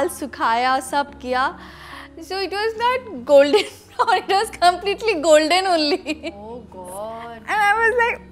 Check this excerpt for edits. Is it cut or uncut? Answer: uncut